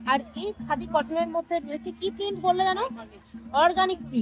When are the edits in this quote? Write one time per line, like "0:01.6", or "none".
none